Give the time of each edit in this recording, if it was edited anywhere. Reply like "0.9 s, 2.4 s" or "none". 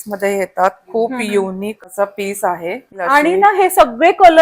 1.8 s, 3.0 s